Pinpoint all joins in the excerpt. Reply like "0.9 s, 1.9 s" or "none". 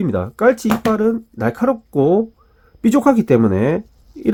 none